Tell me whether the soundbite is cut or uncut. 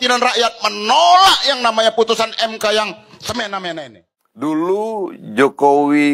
cut